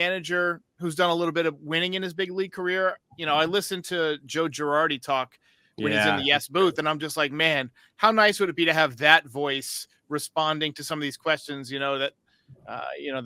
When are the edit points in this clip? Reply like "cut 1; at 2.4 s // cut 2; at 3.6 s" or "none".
none

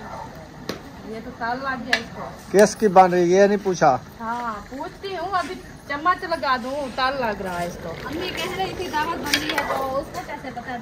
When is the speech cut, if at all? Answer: none

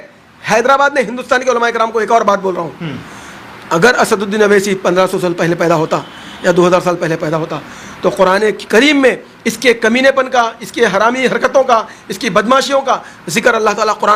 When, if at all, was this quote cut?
none

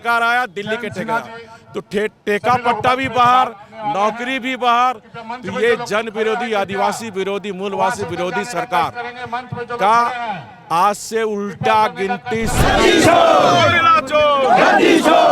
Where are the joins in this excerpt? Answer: cut 1; at 12.6 s

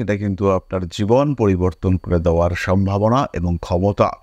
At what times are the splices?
none

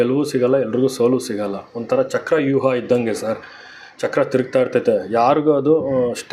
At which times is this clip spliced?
none

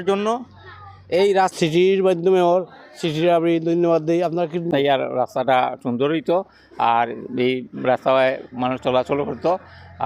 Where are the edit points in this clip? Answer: cut 1; at 1.5 s // cut 2; at 4.6 s

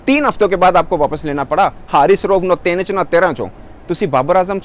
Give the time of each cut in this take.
none

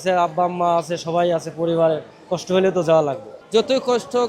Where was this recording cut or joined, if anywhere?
cut 1; at 3.3 s

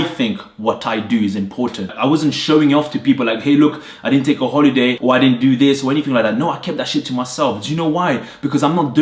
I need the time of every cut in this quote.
none

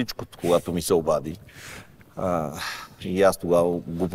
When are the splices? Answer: none

